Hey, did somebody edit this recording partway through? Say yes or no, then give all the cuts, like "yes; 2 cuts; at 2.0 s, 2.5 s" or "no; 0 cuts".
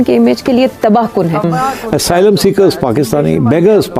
yes; 1 cut; at 1.4 s